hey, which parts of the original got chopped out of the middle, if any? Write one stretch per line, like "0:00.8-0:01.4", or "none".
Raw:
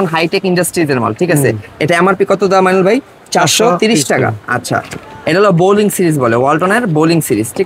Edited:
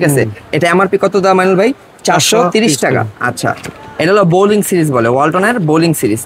none